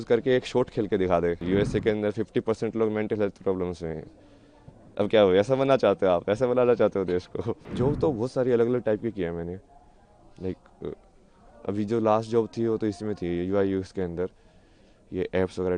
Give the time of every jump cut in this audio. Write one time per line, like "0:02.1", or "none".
0:01.4
0:07.6